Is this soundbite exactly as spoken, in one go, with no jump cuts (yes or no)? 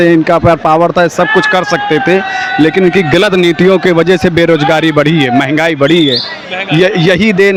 yes